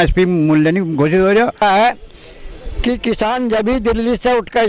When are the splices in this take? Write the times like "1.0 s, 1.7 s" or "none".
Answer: 1.6 s